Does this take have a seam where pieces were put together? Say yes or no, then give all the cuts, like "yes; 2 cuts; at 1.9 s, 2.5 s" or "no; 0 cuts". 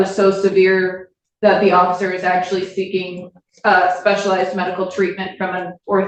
no; 0 cuts